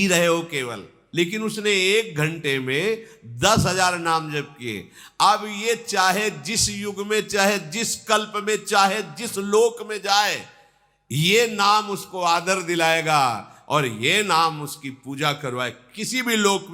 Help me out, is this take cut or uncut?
cut